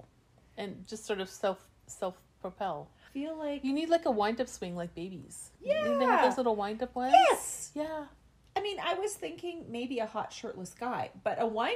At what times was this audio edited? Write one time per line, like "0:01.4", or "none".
0:03.0